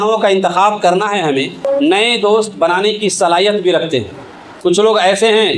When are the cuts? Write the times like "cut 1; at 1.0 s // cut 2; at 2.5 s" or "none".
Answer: cut 1; at 1.7 s